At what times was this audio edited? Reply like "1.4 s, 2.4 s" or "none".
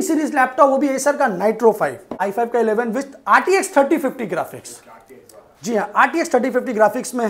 2.2 s